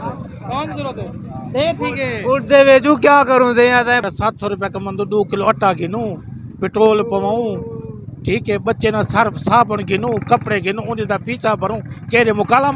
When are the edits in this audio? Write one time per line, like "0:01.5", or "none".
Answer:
0:04.0